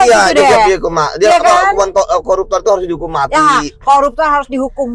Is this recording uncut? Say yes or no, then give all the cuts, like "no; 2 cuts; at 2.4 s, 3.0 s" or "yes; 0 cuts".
yes; 0 cuts